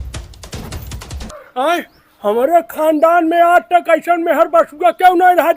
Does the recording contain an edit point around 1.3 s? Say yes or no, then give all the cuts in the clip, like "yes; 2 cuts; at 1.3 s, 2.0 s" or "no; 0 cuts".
yes; 1 cut; at 1.3 s